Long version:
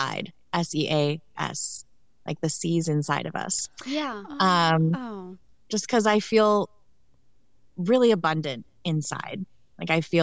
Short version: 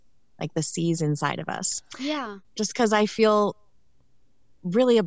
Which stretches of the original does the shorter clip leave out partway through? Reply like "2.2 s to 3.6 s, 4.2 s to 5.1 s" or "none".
4.2 s to 5.5 s